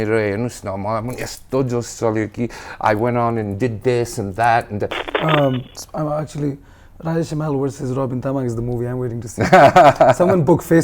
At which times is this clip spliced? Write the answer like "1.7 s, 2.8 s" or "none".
5.1 s